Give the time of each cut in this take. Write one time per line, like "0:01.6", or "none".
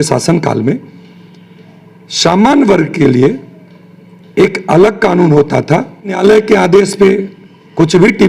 0:06.2